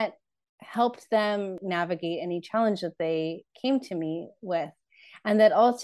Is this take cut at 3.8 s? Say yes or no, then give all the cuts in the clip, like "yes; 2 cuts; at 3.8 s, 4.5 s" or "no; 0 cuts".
no; 1 cut; at 1.6 s